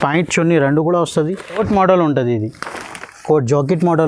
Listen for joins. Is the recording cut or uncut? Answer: cut